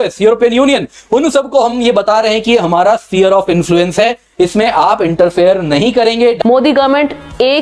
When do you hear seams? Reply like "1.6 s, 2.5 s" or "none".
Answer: 6.4 s